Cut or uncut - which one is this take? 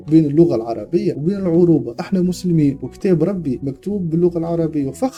uncut